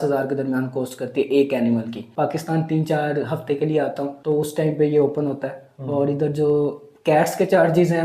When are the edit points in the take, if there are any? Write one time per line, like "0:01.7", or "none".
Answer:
0:02.1
0:04.1